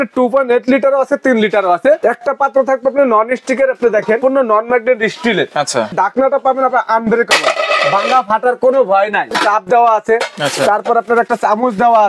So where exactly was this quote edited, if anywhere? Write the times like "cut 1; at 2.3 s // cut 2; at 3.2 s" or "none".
cut 1; at 2.0 s // cut 2; at 4.2 s // cut 3; at 5.9 s // cut 4; at 9.3 s